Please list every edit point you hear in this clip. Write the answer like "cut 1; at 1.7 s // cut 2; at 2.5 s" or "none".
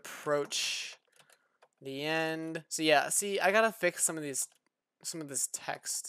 none